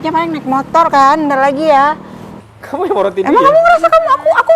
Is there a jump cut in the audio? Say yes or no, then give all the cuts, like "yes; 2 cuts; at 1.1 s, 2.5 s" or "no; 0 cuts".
yes; 1 cut; at 2.3 s